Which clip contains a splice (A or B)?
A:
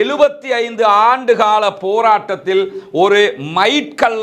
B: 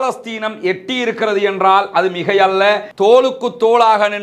B